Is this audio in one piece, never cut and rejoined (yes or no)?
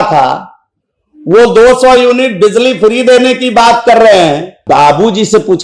no